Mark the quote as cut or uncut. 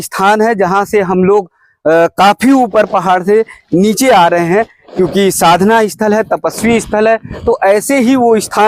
uncut